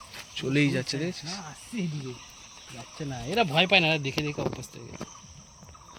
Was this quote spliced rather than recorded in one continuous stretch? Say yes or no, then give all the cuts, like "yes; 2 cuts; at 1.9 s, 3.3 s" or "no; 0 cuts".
no; 0 cuts